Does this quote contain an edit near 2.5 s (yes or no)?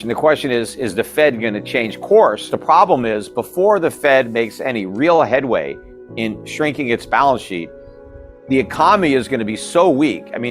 yes